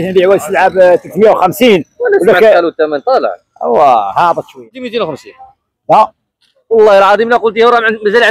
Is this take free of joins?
no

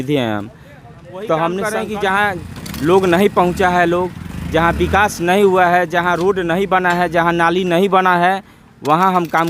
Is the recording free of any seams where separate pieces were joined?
no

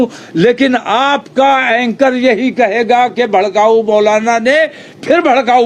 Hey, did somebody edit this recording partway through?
no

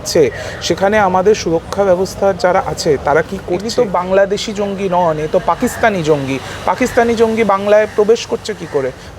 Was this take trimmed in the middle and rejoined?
yes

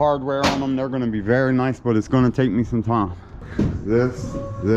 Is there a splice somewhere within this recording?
yes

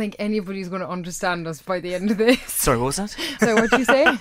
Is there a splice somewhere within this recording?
no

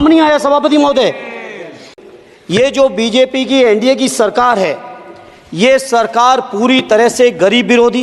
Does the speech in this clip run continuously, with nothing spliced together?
no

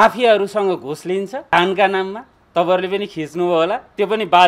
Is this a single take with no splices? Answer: no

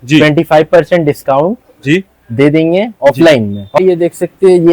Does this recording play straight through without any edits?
no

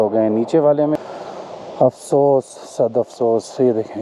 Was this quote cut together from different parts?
yes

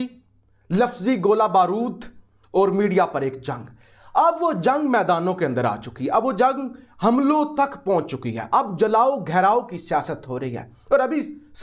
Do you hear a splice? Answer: no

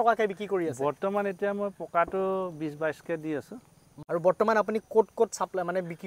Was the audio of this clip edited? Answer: no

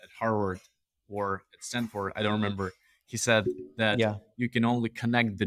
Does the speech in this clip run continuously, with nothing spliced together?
yes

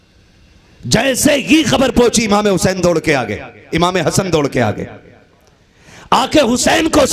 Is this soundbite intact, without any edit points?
yes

